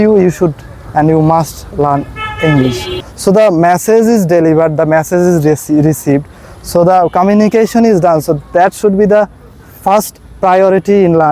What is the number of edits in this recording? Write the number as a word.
one